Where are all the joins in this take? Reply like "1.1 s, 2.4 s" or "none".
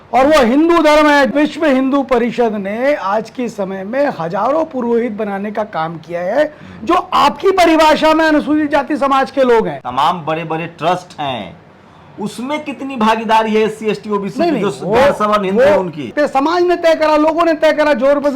1.3 s, 9.8 s, 16.1 s